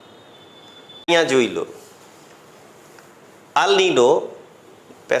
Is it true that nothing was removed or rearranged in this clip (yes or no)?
no